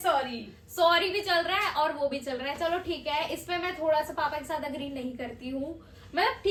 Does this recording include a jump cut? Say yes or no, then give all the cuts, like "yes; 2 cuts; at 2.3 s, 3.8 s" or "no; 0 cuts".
no; 0 cuts